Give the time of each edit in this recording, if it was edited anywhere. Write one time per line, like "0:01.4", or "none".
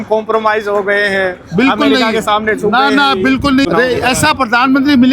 0:03.6